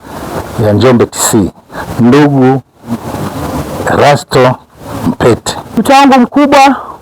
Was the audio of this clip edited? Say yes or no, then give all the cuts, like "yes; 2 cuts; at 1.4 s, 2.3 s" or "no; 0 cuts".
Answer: yes; 1 cut; at 5.6 s